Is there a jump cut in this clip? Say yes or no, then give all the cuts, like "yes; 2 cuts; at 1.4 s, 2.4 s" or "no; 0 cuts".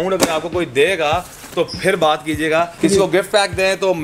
yes; 1 cut; at 2.7 s